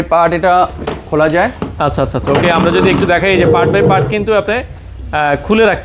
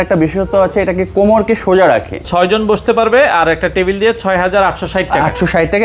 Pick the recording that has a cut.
second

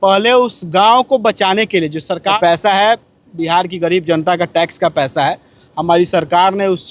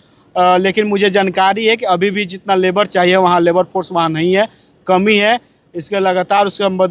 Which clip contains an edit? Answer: first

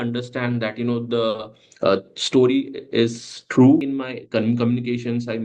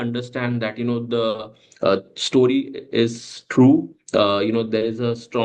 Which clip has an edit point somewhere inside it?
first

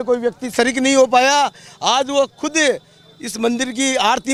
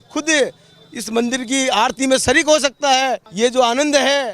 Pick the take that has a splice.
second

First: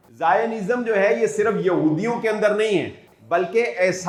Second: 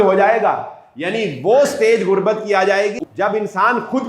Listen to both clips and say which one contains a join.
second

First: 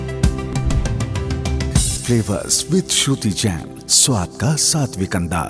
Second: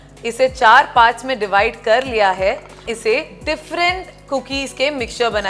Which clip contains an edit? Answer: second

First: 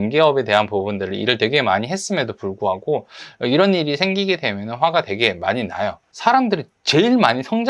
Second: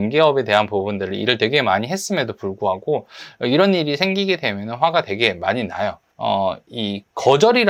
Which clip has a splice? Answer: first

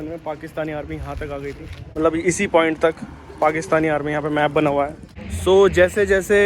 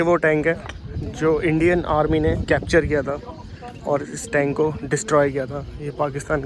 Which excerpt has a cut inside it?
first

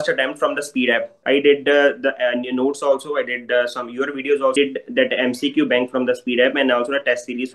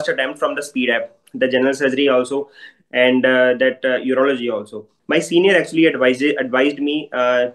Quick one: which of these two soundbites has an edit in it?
first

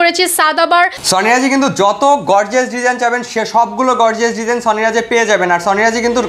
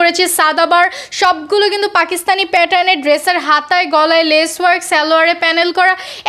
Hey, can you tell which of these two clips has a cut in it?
first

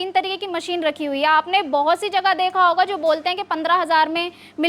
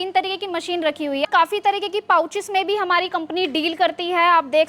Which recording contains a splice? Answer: second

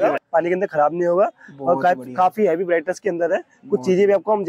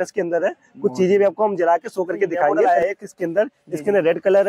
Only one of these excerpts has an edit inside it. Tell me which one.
second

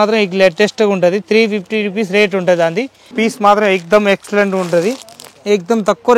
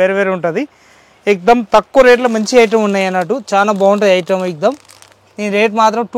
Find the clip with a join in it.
first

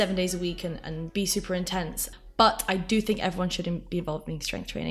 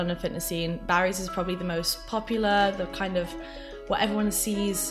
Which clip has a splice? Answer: first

